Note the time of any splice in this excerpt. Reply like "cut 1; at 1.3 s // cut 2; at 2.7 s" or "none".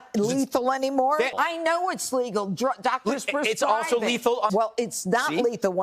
cut 1; at 1.3 s // cut 2; at 4.5 s